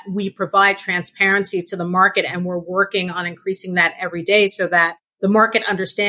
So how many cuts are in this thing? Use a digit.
1